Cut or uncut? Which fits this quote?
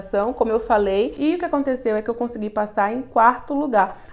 cut